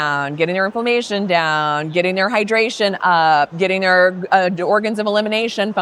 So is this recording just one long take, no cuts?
yes; 0 cuts

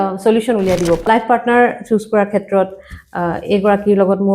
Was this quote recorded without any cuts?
no; 1 cut; at 1.0 s

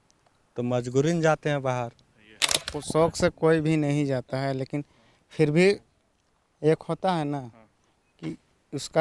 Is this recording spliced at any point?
yes; 1 cut; at 2.7 s

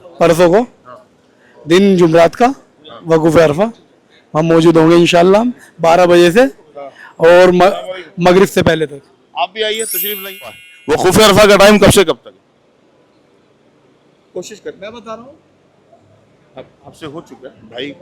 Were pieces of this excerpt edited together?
yes; 1 cut; at 10.7 s

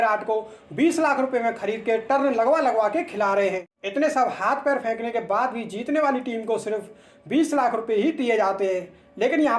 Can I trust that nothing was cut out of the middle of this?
no; 1 cut; at 3.8 s

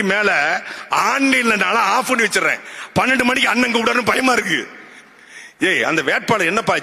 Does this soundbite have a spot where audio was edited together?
no; 0 cuts

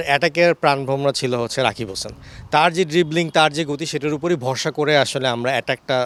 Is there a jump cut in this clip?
no; 0 cuts

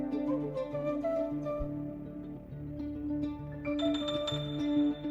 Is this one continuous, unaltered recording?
yes; 0 cuts

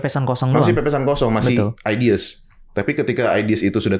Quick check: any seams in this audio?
no; 0 cuts

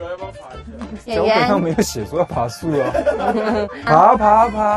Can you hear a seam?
yes; 1 cut; at 3.8 s

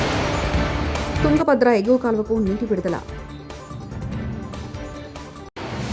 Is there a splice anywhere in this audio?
yes; 1 cut; at 1.2 s

